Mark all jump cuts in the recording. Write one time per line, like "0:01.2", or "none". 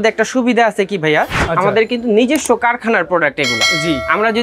0:01.4